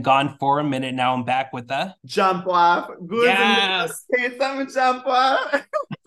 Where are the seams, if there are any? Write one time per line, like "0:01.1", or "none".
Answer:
none